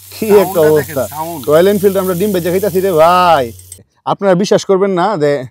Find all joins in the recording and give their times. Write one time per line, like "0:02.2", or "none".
0:03.9